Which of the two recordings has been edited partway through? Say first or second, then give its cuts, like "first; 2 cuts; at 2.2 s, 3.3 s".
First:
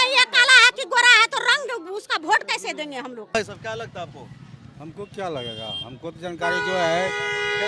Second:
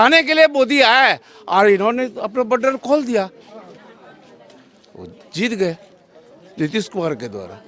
first; 1 cut; at 3.4 s